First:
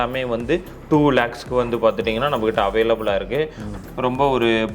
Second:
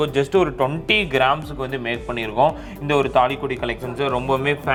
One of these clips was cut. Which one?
first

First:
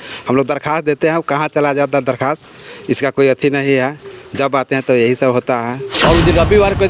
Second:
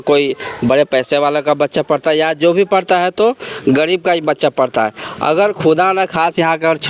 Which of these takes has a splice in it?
first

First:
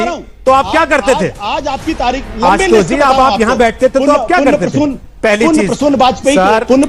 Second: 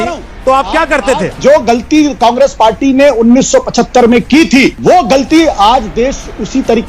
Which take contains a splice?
second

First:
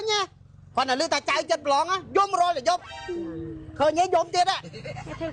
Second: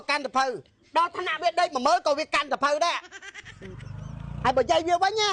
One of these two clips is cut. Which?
second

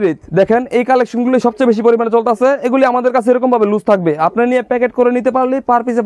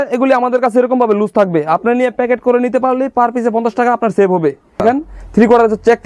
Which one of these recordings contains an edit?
second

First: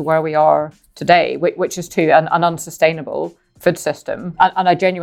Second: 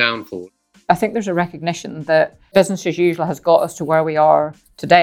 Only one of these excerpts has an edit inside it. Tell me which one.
second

